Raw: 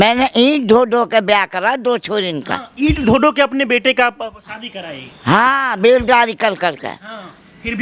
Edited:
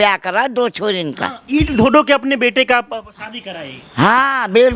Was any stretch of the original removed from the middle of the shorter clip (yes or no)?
no